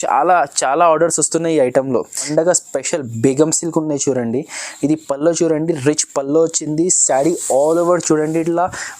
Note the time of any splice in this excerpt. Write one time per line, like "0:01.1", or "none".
0:02.2